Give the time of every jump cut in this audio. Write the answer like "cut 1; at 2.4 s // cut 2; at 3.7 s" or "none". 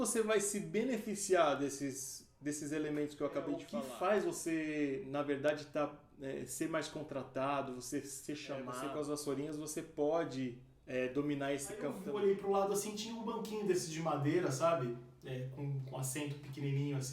cut 1; at 3.7 s // cut 2; at 8.7 s // cut 3; at 12.0 s